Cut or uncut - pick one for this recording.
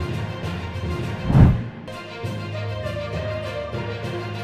cut